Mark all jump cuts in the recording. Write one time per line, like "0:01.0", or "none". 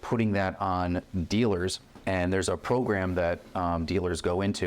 0:01.9